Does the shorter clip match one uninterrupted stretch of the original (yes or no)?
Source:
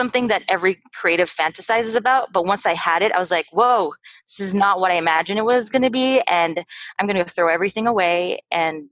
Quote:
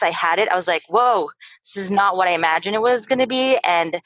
yes